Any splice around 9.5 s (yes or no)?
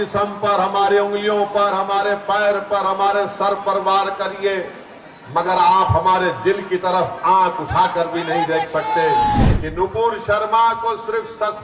yes